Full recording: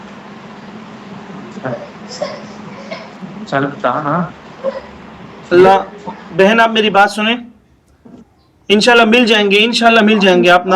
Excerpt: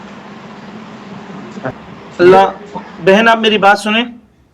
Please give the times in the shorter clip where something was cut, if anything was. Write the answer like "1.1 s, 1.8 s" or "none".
1.7 s